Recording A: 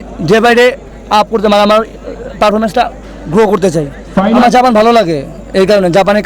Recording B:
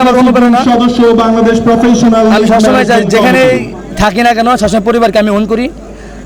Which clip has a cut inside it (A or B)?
A